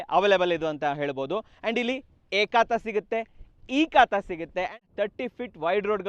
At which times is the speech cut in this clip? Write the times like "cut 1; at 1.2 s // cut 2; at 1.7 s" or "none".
cut 1; at 4.8 s